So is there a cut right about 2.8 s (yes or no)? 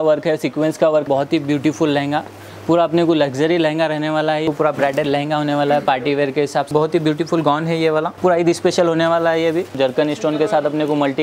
no